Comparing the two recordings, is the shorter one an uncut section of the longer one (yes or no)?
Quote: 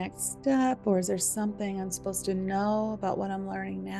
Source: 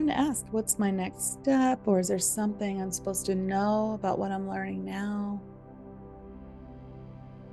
yes